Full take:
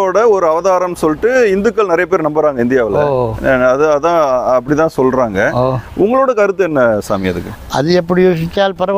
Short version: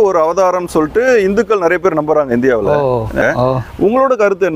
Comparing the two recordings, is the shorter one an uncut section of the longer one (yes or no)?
no